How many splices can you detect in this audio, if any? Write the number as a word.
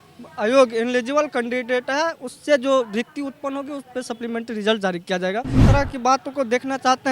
one